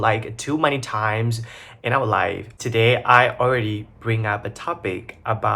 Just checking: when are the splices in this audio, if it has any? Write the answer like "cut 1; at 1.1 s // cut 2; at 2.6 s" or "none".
cut 1; at 2.6 s